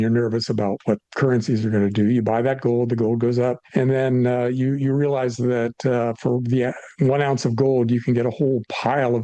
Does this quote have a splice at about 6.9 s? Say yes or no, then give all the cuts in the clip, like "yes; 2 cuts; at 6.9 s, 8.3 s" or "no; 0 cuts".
no; 1 cut; at 3.6 s